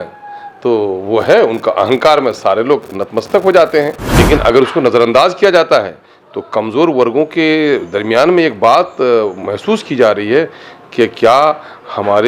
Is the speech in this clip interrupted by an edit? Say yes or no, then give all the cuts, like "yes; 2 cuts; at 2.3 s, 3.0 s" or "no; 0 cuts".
yes; 1 cut; at 4.1 s